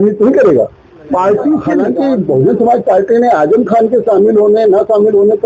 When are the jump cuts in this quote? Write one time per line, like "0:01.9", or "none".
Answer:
0:01.9